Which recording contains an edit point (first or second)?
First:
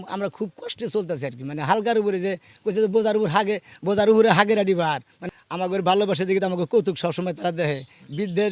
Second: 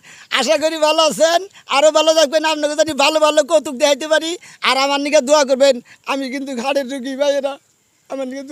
first